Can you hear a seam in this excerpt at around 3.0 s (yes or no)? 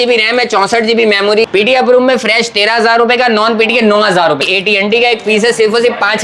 no